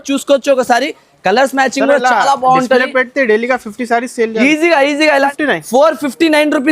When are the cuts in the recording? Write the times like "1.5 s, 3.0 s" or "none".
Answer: 5.3 s